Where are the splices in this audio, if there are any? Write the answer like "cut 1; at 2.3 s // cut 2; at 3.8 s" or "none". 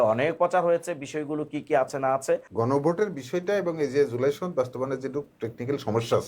cut 1; at 2.5 s